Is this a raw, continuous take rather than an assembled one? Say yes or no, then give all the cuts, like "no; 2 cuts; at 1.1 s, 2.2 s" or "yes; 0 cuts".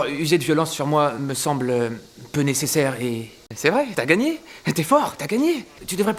yes; 0 cuts